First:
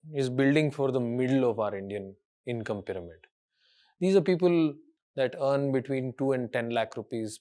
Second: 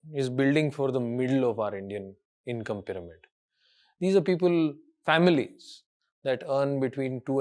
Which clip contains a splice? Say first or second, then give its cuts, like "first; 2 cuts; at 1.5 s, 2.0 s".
first; 1 cut; at 4.9 s